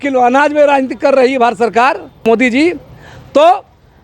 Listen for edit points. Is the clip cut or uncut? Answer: cut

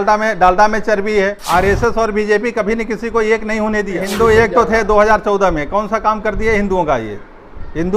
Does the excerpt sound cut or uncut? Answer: cut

